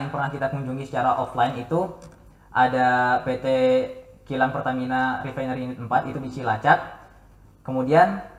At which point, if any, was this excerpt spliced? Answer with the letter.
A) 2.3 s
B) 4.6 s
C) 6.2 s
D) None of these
D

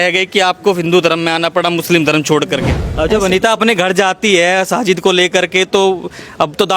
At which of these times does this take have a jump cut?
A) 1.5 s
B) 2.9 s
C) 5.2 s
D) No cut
B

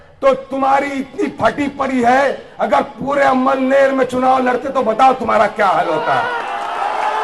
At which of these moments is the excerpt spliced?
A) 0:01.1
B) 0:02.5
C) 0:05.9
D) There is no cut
D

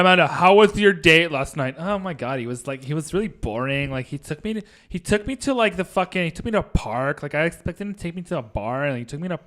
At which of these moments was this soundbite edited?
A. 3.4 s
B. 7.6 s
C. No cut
C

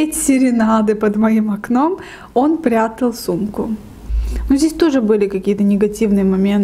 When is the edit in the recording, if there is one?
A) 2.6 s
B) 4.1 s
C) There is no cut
B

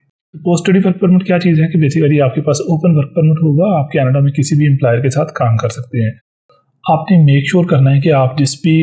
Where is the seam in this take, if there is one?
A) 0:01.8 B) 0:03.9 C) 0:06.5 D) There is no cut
C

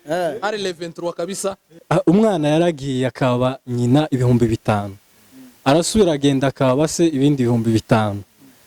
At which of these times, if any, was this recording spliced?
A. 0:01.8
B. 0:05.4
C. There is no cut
A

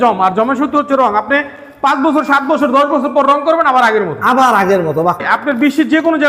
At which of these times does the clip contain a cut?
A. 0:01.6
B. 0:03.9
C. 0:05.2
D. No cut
C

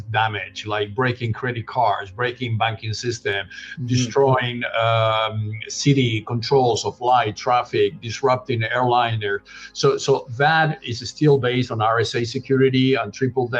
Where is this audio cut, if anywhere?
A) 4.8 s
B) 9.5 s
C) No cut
C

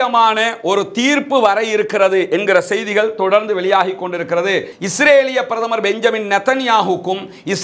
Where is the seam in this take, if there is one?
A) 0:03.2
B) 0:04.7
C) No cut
B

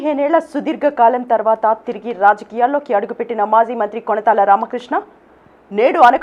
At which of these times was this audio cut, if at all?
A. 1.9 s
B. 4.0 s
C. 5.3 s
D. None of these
D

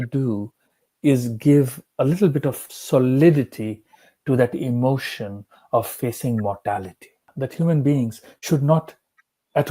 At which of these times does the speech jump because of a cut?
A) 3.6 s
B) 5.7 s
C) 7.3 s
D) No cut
C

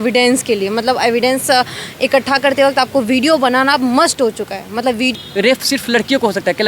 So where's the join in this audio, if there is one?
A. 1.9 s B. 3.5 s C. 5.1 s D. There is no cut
C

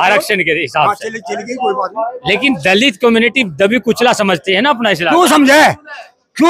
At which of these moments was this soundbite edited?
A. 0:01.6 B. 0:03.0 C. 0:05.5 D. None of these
D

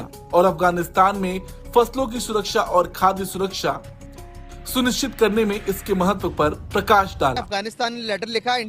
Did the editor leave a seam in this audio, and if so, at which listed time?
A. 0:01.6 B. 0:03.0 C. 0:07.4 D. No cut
C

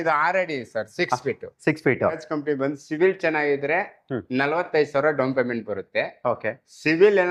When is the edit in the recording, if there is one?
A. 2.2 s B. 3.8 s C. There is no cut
A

